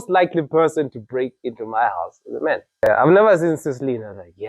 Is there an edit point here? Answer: yes; 1 cut; at 2.9 s

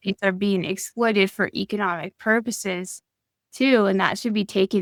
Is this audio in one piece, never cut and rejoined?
yes; 0 cuts

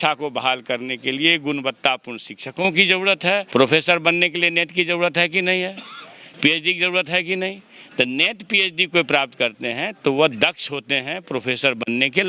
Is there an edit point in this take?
yes; 1 cut; at 3.5 s

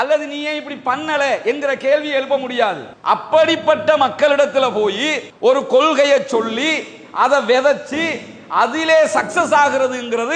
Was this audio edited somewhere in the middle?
yes; 1 cut; at 2.9 s

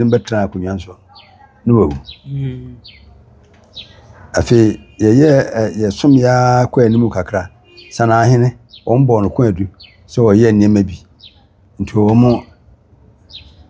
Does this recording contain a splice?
no; 0 cuts

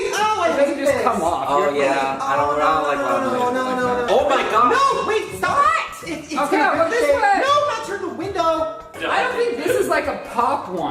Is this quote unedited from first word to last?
no; 2 cuts; at 4.0 s, 9.0 s

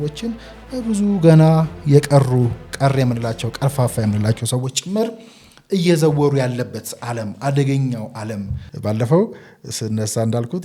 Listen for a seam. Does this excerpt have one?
yes; 1 cut; at 8.6 s

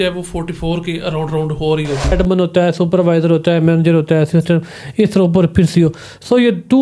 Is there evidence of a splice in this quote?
yes; 1 cut; at 2.1 s

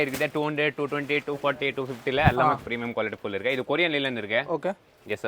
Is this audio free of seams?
yes; 0 cuts

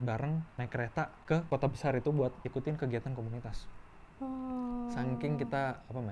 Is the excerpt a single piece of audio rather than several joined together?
yes; 0 cuts

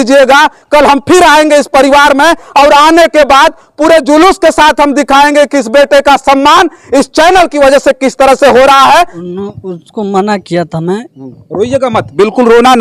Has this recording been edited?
yes; 1 cut; at 9.2 s

